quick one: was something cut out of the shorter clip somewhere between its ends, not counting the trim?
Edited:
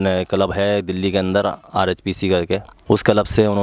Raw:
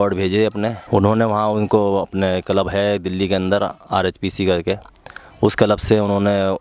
yes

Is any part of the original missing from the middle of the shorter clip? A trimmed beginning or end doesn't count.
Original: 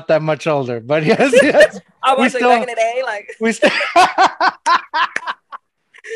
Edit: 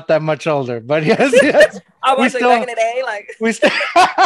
no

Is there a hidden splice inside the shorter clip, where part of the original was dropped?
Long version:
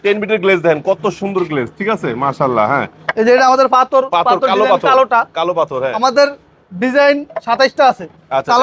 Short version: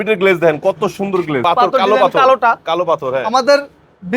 yes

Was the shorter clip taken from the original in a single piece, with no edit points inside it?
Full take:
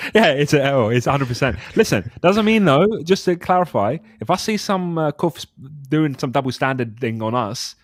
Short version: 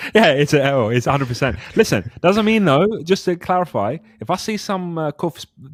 yes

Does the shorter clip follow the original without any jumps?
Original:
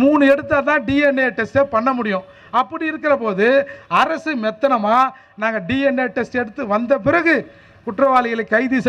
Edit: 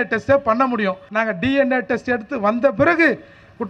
no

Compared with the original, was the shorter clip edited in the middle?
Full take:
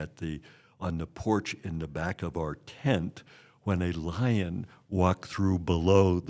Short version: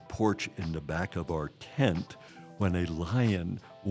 no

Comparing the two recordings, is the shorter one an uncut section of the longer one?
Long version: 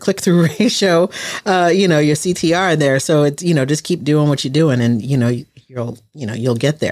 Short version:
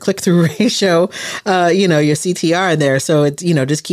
yes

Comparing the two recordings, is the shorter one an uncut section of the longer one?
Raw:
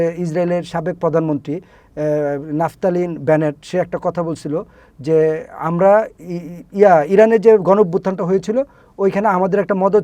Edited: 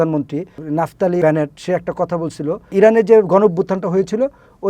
no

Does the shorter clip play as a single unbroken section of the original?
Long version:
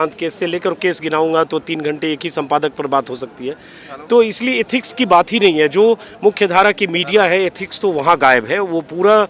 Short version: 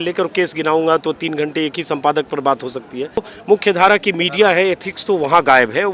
no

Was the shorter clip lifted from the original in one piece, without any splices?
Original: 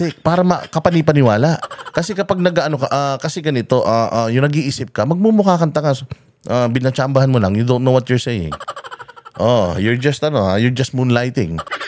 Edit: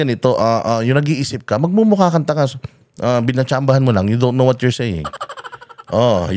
yes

